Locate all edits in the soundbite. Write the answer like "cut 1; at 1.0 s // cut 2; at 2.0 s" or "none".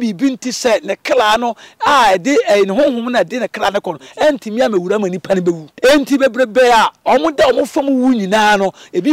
cut 1; at 5.7 s